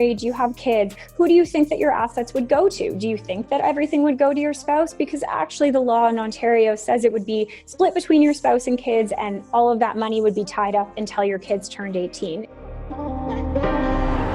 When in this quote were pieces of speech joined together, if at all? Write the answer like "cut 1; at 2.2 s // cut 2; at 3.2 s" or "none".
cut 1; at 12.5 s

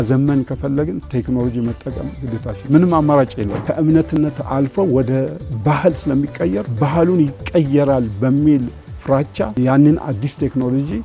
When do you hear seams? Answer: cut 1; at 3.6 s // cut 2; at 6.7 s // cut 3; at 9.5 s

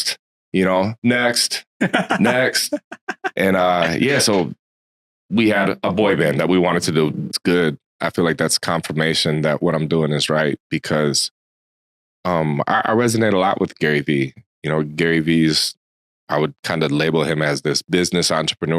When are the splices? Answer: cut 1; at 7.3 s

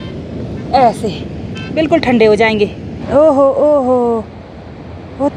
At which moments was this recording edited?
cut 1; at 2.9 s

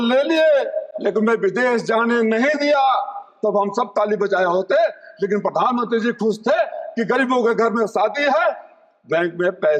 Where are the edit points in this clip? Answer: none

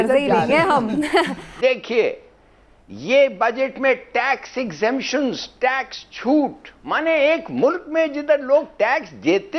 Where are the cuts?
cut 1; at 1.4 s

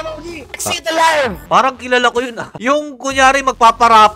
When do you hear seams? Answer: cut 1; at 1.4 s

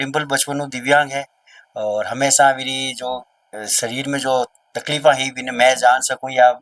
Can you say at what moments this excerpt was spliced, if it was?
none

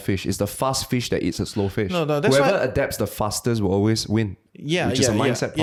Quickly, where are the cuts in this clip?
none

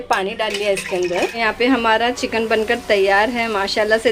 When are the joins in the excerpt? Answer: cut 1; at 1.3 s

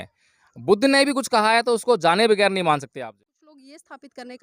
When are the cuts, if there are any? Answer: cut 1; at 3.0 s

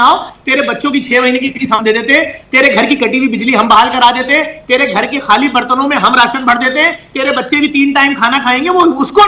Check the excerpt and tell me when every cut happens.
none

